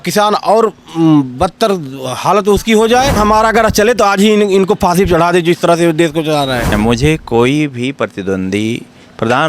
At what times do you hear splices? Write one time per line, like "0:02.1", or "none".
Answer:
0:03.2
0:06.7